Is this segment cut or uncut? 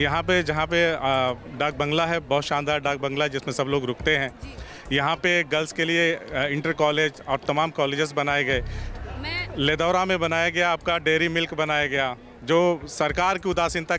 uncut